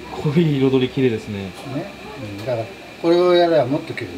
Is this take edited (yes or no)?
no